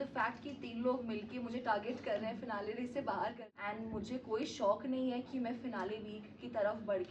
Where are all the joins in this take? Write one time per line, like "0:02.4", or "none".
0:03.4